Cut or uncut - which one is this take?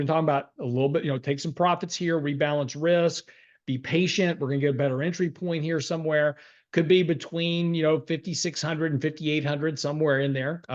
uncut